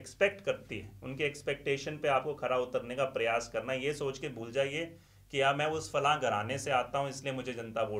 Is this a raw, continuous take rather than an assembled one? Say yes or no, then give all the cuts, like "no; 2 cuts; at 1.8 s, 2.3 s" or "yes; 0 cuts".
yes; 0 cuts